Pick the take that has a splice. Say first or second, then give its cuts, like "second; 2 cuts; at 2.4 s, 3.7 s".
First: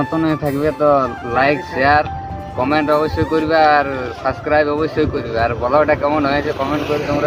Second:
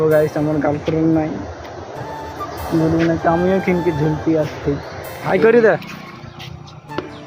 second; 1 cut; at 5.2 s